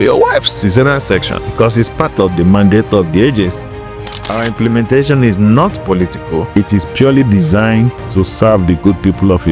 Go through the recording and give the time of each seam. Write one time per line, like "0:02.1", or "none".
0:01.4
0:04.2
0:06.5